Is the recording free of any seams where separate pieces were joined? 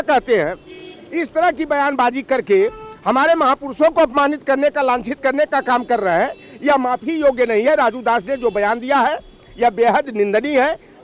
yes; 0 cuts

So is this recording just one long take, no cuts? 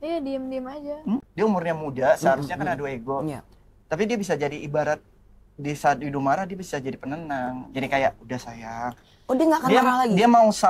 no; 1 cut; at 1.3 s

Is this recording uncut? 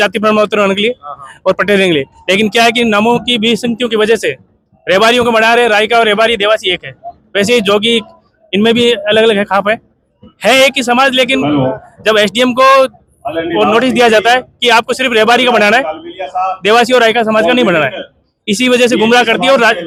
yes; 0 cuts

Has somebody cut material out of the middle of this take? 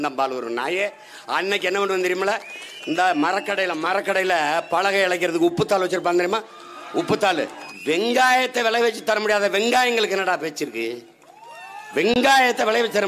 yes; 1 cut; at 7.7 s

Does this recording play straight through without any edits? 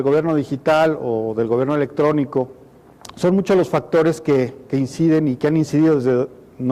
no; 1 cut; at 2.6 s

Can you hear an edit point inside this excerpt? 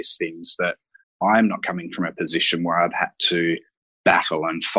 no; 0 cuts

